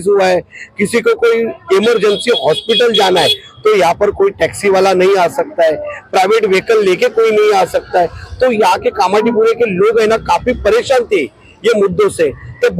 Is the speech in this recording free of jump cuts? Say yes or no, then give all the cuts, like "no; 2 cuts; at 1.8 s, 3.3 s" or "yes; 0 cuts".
yes; 0 cuts